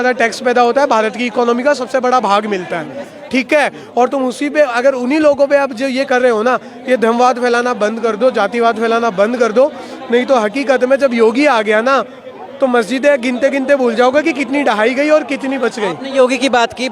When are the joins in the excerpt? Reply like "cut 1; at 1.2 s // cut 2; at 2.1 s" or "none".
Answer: none